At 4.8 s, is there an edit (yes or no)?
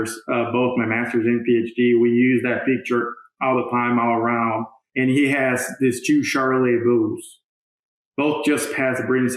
yes